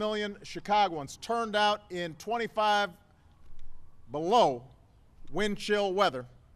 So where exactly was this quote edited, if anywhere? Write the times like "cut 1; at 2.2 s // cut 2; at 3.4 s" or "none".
none